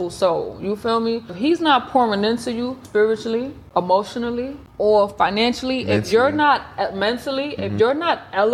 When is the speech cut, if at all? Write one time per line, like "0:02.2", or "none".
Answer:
0:01.4
0:02.8
0:03.6
0:04.6

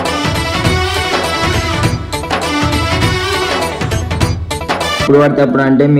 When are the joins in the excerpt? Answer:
0:05.1

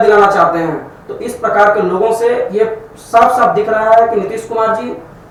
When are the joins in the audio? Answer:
none

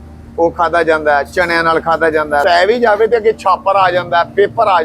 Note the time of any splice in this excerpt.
0:02.4

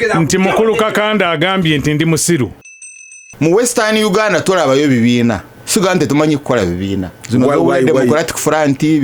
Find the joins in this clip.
0:02.8
0:05.5
0:07.1

